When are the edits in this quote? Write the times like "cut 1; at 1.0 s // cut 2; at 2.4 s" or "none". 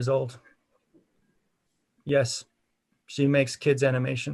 none